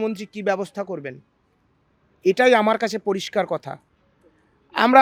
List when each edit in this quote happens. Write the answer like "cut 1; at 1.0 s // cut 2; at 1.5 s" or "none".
none